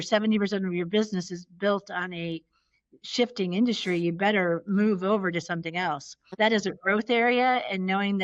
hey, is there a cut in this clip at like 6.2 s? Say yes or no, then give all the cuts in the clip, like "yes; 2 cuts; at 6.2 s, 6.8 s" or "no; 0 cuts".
yes; 1 cut; at 6.2 s